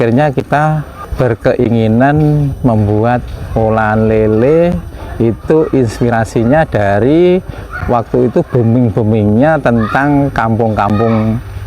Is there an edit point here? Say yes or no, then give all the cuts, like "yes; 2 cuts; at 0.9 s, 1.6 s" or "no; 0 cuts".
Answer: yes; 1 cut; at 1.0 s